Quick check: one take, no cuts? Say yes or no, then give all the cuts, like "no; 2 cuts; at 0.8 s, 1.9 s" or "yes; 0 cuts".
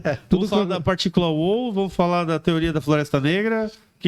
yes; 0 cuts